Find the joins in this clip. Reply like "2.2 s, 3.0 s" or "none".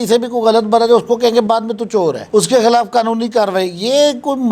none